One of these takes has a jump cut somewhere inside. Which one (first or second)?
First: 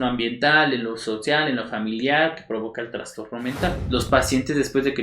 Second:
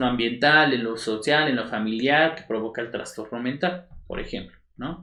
first